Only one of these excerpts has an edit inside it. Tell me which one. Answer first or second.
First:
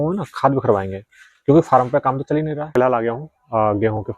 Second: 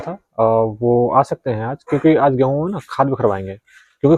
first